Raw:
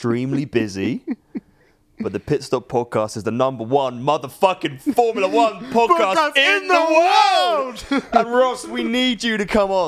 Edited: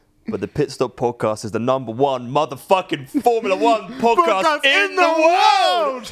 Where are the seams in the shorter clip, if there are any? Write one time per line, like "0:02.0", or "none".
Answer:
none